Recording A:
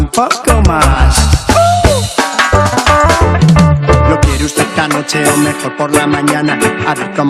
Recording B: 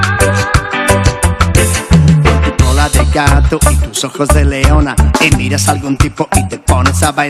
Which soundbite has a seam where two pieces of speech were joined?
A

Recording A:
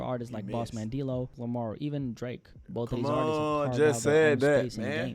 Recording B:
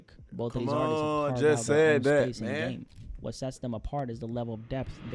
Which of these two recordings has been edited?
A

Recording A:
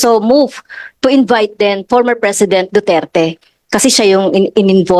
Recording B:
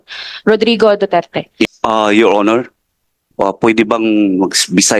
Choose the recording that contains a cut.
B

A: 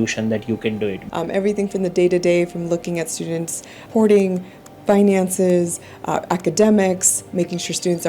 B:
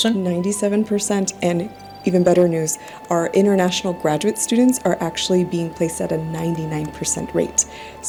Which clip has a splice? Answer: A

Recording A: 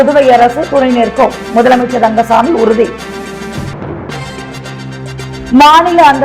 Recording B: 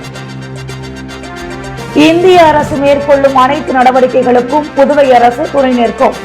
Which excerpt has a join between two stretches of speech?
B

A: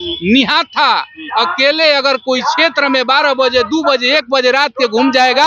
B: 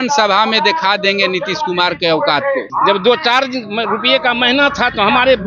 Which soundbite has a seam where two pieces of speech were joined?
B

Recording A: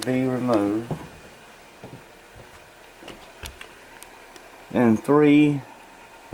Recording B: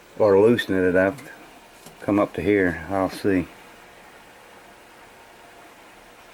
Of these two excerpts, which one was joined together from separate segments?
B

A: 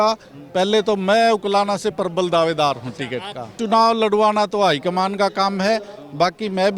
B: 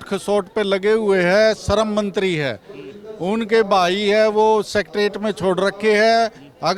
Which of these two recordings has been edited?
A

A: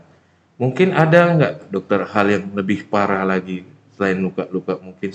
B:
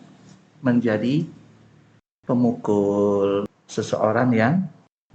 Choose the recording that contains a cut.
B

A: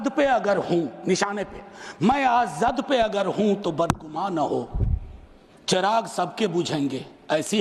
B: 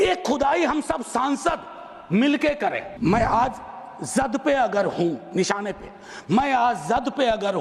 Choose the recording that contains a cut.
B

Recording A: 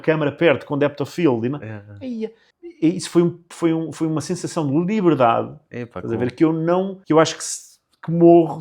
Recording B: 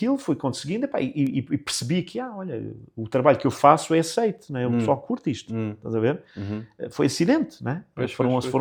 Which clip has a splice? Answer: A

